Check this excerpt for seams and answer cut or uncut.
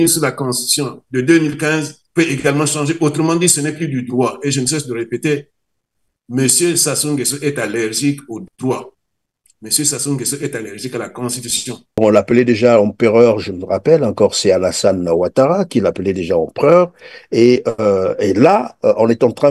cut